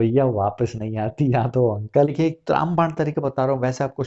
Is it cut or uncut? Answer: cut